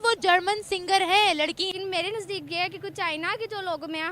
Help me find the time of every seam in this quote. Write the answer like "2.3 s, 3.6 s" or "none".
1.7 s